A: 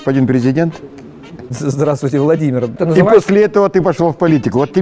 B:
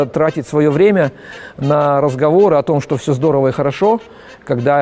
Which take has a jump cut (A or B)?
A